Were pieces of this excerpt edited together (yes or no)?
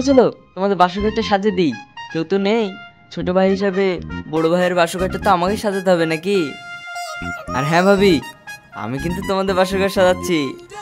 no